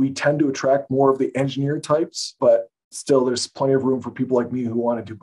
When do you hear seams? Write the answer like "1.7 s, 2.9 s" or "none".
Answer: 2.3 s